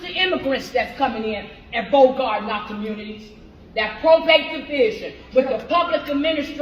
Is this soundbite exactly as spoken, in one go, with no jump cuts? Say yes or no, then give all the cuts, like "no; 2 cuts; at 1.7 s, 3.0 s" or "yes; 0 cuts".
yes; 0 cuts